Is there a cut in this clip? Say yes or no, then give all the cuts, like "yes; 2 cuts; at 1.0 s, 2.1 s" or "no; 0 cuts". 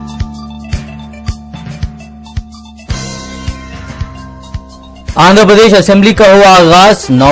yes; 1 cut; at 4.3 s